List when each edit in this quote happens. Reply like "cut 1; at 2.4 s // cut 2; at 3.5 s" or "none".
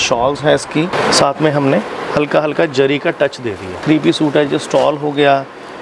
cut 1; at 0.9 s // cut 2; at 3.8 s